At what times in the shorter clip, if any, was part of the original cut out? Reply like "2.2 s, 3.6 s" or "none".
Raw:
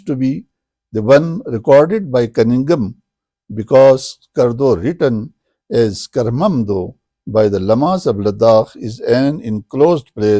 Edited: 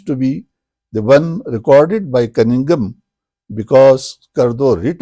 none